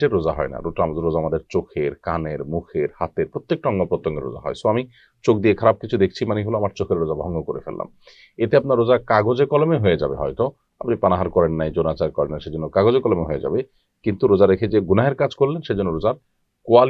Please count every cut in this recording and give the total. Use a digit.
0